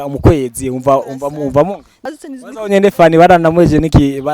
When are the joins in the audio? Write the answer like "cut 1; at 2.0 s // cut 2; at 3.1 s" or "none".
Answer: cut 1; at 1.9 s